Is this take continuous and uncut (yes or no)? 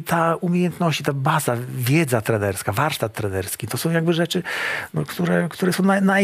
yes